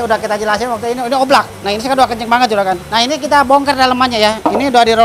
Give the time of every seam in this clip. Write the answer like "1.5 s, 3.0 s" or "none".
none